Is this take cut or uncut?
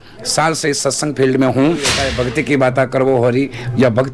cut